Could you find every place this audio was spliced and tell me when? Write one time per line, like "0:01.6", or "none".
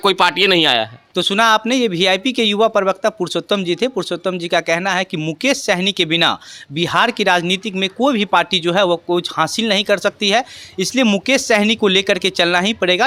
none